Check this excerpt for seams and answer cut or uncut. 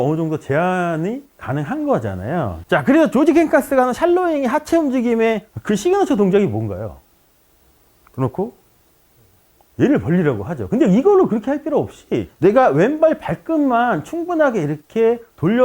cut